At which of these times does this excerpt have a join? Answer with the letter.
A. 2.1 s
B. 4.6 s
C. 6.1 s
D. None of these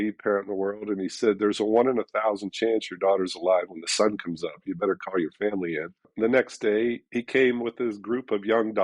C